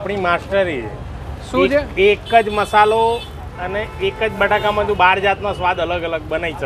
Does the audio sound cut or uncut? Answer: uncut